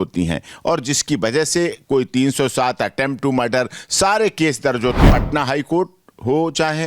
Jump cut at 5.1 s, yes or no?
yes